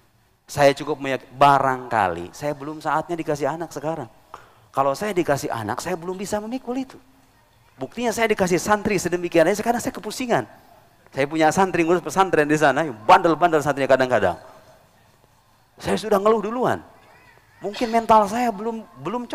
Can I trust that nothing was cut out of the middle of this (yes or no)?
yes